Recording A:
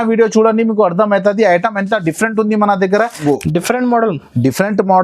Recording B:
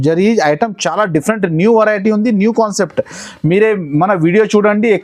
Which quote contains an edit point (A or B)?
A